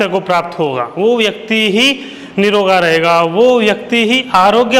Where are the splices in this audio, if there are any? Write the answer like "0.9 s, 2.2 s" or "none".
none